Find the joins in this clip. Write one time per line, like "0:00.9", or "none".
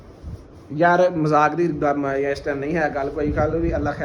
none